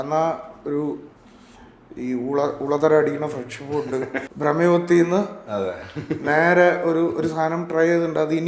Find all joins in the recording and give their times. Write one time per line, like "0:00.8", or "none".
0:04.2